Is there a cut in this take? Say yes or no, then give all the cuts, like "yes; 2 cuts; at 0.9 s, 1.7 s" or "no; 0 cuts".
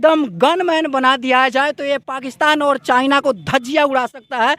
no; 0 cuts